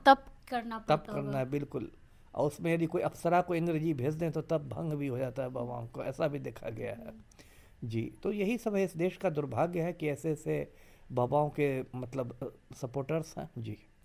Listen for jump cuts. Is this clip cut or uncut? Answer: uncut